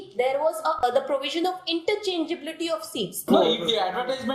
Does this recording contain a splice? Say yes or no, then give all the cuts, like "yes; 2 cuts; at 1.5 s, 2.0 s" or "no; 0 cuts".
yes; 2 cuts; at 0.8 s, 3.2 s